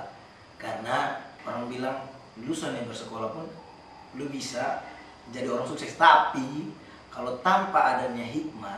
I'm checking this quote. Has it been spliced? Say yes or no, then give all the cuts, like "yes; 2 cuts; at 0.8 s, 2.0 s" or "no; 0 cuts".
yes; 2 cuts; at 1.3 s, 2.2 s